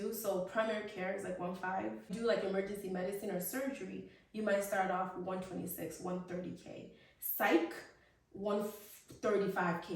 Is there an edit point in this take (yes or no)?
no